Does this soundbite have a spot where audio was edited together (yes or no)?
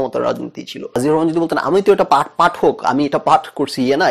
yes